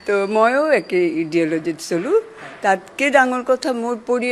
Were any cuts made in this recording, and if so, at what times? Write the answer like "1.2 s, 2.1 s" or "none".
none